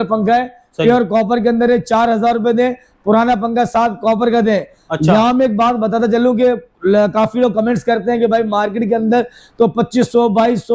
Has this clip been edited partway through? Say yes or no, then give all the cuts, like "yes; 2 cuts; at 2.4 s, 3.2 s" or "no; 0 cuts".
no; 0 cuts